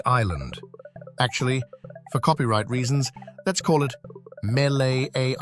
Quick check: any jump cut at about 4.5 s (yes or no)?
no